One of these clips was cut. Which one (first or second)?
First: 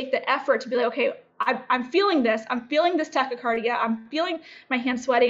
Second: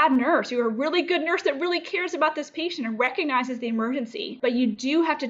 second